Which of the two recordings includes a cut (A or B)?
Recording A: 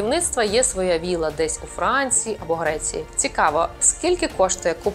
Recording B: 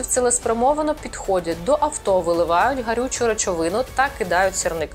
A